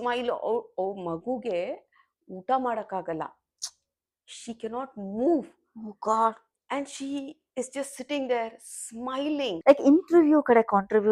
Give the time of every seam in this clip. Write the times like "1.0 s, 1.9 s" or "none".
9.5 s